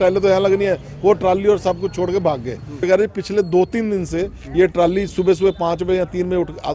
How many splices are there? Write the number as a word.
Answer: one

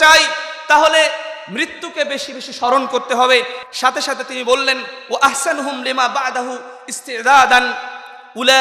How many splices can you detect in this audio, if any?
zero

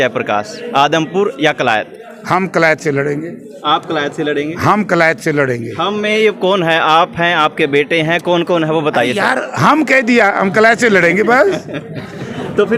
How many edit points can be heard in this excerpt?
zero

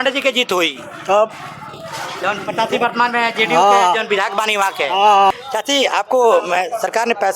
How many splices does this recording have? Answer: one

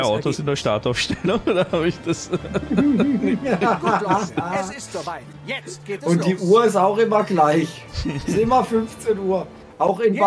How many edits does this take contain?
zero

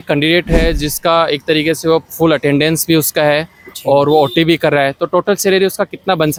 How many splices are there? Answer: zero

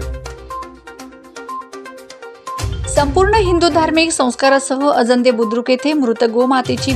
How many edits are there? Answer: one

